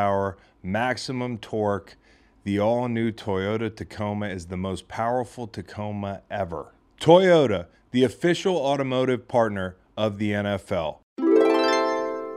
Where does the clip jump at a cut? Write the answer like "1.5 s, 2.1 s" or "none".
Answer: 11.0 s

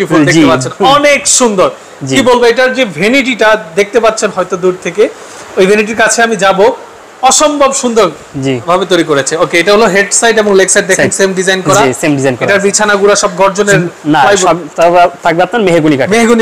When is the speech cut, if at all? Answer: none

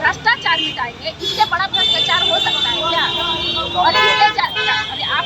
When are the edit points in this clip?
none

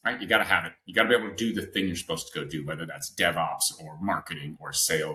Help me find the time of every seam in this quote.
none

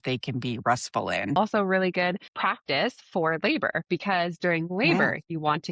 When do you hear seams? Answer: 1.4 s, 2.3 s

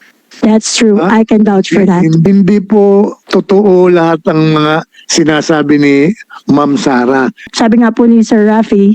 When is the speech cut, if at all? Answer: 2.2 s, 3.2 s, 7.5 s

